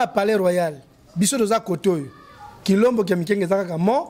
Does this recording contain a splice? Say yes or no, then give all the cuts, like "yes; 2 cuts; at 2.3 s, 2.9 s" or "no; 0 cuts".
no; 0 cuts